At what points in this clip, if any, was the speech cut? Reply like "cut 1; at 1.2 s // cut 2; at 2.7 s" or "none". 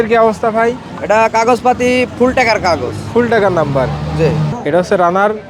cut 1; at 4.5 s